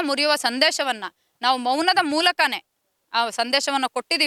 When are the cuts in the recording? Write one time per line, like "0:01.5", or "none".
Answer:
none